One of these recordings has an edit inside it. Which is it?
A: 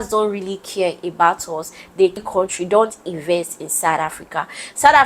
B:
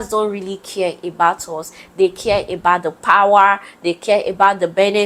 A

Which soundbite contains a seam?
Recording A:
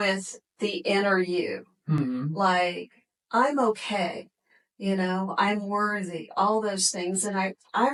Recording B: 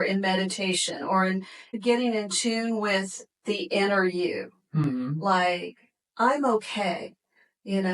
B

